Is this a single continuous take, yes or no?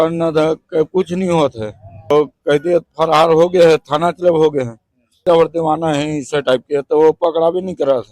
no